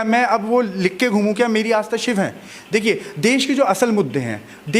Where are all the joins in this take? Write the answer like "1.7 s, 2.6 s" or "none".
none